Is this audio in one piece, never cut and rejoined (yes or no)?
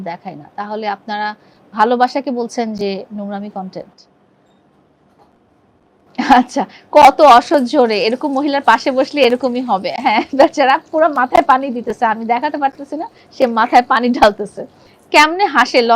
yes